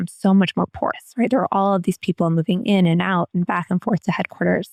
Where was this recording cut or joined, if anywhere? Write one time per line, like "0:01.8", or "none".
none